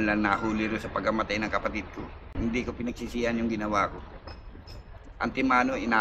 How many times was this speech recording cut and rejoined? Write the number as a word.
one